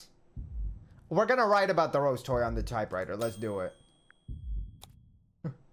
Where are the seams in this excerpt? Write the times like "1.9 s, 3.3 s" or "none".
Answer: none